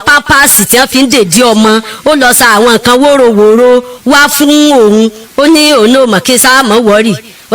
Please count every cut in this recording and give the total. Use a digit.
1